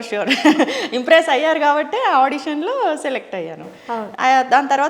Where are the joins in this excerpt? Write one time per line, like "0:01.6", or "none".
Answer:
none